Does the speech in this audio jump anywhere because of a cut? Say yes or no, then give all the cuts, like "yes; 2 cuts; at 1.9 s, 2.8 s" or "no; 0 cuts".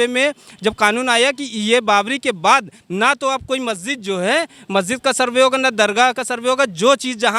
no; 0 cuts